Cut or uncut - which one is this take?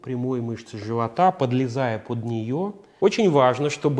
cut